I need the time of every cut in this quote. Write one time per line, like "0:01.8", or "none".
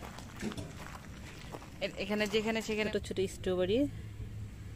0:02.9